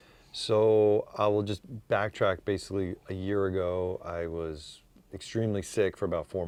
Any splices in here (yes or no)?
no